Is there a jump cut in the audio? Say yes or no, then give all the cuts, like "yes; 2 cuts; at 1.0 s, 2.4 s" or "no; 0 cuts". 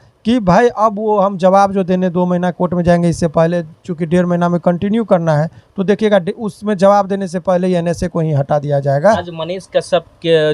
yes; 1 cut; at 9.3 s